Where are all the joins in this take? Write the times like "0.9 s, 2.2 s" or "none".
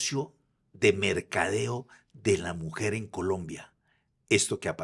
none